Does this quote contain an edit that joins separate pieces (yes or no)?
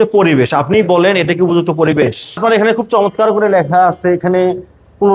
yes